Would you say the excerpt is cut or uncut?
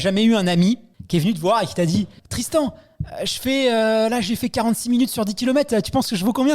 cut